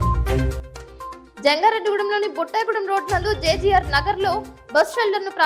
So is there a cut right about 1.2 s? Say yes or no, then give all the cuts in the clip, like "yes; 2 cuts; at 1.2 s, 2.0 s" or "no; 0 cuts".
yes; 1 cut; at 1.2 s